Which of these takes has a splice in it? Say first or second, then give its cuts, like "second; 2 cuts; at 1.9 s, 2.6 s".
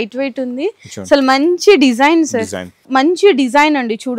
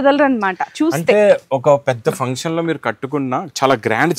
first; 1 cut; at 2.8 s